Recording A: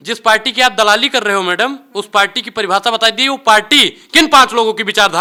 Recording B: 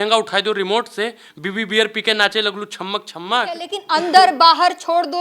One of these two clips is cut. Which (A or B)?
B